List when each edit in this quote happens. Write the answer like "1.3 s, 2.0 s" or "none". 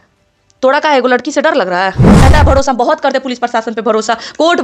2.2 s